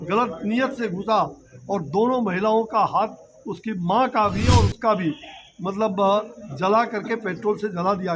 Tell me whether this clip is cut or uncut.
uncut